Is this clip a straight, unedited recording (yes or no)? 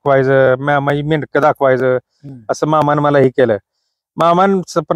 yes